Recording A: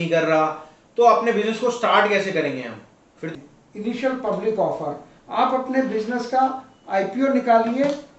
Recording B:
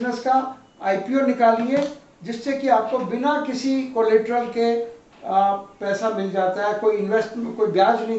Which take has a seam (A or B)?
A